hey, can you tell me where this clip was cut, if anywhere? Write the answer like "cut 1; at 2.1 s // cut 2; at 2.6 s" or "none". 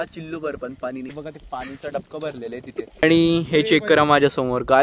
cut 1; at 1.2 s // cut 2; at 3.0 s